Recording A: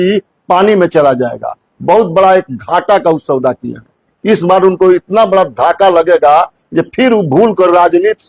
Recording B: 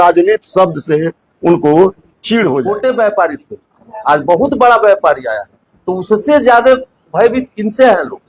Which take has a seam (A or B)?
B